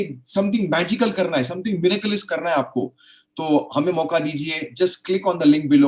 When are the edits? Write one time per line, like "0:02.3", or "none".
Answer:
none